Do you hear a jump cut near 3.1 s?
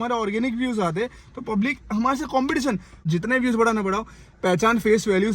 yes; 1 cut; at 3.1 s

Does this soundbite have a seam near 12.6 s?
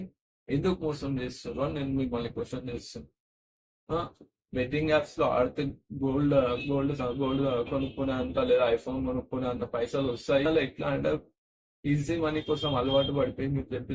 no; 1 cut; at 10.5 s

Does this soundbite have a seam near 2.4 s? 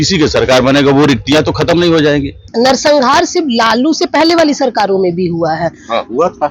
yes; 1 cut; at 2.4 s

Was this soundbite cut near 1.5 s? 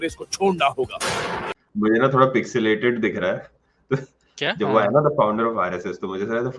yes; 1 cut; at 1.5 s

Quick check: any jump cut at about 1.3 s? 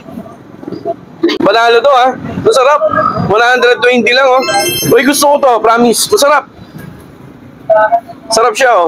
yes; 2 cuts; at 1.3 s, 4.6 s

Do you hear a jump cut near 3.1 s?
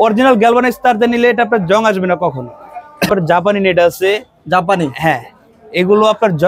yes; 1 cut; at 3.1 s

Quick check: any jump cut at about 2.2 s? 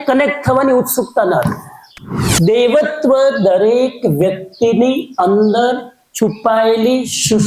yes; 1 cut; at 2.2 s

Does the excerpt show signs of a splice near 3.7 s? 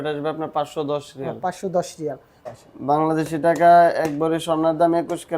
no; 1 cut; at 2.4 s

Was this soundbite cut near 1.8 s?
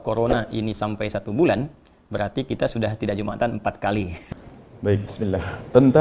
no; 1 cut; at 4.2 s

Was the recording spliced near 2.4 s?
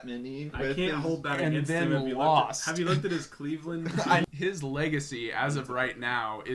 no; 1 cut; at 4.2 s

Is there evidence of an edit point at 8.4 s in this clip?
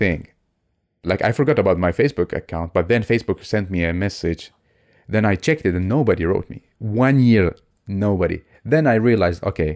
no; 1 cut; at 1.0 s

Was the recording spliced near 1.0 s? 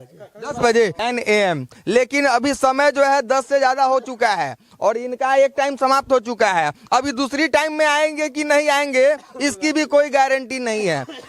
yes; 1 cut; at 1.0 s

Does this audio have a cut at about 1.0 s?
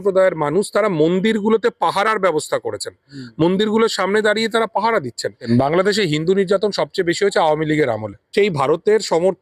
no; 2 cuts; at 5.4 s, 8.3 s

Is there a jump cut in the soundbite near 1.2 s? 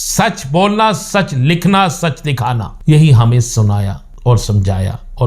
no; 2 cuts; at 2.7 s, 4.0 s

